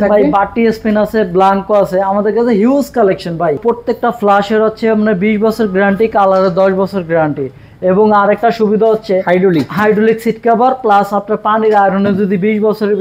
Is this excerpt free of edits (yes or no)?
no